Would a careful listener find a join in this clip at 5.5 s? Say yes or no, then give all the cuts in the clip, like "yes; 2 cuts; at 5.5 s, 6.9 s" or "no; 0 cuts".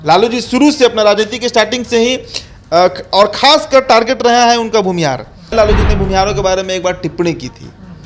yes; 1 cut; at 5.5 s